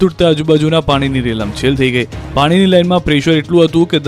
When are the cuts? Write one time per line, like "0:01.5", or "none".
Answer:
0:02.4